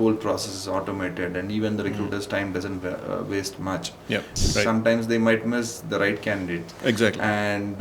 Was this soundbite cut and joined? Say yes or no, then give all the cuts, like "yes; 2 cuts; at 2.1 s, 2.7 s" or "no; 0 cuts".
yes; 1 cut; at 4.4 s